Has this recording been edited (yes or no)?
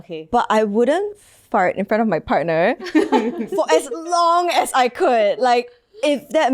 no